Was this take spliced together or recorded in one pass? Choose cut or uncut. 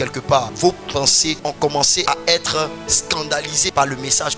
cut